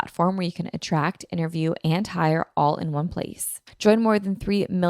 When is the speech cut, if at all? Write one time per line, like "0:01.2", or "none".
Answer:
0:03.6